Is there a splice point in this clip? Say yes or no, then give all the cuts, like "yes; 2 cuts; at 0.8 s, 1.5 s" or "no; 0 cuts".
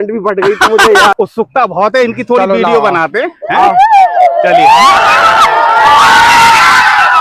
yes; 1 cut; at 1.1 s